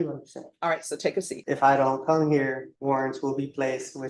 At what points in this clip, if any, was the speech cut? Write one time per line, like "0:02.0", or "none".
0:01.4
0:02.7